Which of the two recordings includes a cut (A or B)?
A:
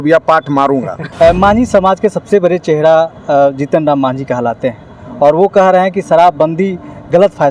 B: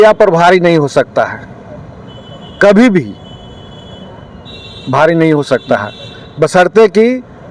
A